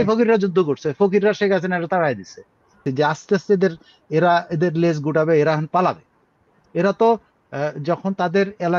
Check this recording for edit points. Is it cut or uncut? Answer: cut